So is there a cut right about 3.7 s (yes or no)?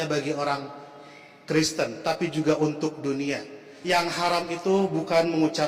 yes